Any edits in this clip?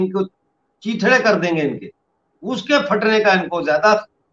no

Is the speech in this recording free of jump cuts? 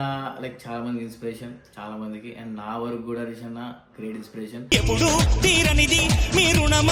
yes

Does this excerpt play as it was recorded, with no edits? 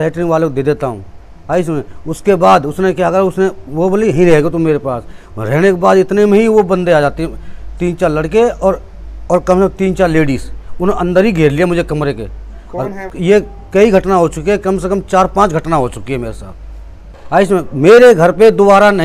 no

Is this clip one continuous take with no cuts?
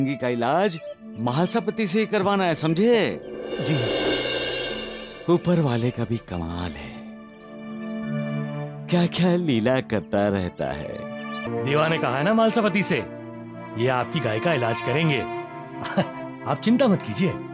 no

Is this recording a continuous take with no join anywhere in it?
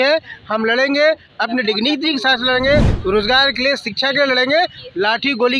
yes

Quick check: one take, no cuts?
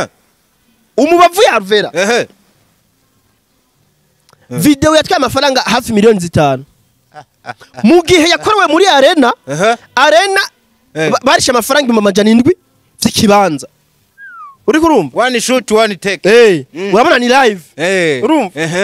yes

